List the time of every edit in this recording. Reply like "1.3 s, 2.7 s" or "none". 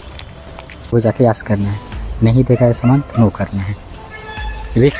0.9 s

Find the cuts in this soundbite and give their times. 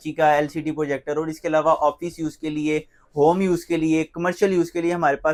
none

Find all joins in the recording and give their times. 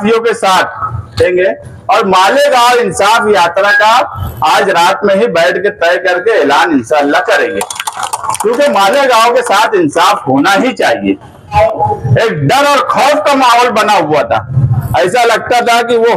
1.1 s, 11.6 s

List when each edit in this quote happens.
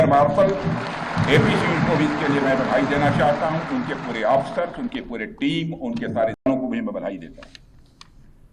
6.5 s

